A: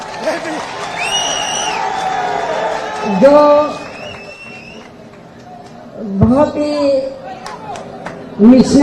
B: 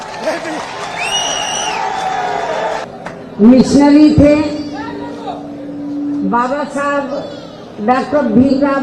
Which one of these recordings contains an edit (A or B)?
B